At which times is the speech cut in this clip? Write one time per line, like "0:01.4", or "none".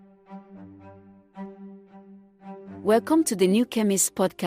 0:02.6